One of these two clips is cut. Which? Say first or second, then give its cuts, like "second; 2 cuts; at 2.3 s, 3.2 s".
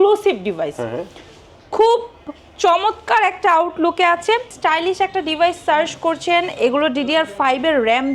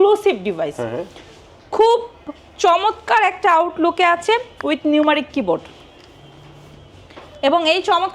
first; 1 cut; at 4.5 s